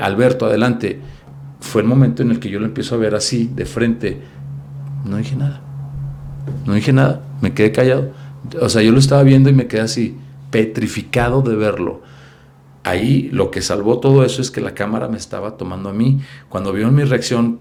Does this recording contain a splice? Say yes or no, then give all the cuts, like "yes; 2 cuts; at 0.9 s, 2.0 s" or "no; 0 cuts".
no; 0 cuts